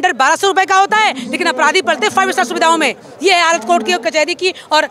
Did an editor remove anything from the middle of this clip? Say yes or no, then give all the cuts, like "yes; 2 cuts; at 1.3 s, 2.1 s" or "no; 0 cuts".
no; 0 cuts